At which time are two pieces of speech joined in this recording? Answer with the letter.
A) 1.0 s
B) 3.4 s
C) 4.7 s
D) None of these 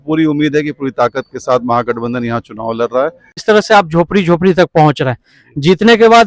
B